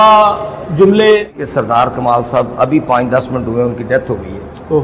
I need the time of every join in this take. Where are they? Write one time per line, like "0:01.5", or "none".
0:01.3